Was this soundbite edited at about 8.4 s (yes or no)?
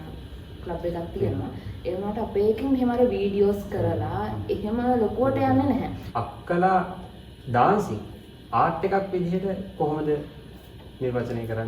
no